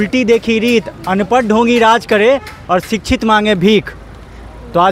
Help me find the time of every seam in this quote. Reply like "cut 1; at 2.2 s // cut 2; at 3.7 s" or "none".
none

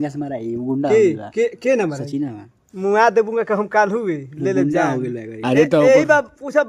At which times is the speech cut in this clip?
none

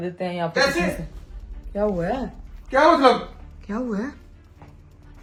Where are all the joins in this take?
none

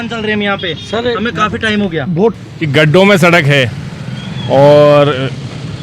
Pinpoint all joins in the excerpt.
cut 1; at 2.3 s

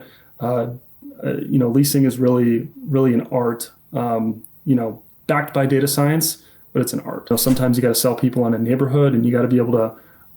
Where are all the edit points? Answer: cut 1; at 7.3 s

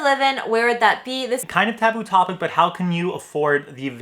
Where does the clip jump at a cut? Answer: cut 1; at 1.4 s

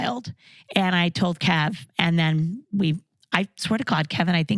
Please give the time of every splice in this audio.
none

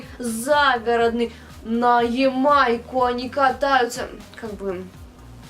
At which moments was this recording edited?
none

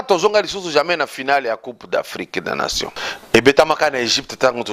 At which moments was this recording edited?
cut 1; at 3.1 s

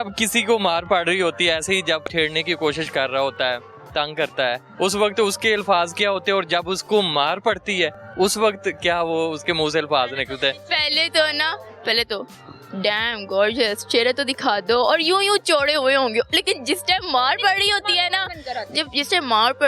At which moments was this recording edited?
cut 1; at 2.0 s // cut 2; at 4.7 s

